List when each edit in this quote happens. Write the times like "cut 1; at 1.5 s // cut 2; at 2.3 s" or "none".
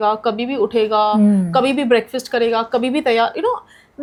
none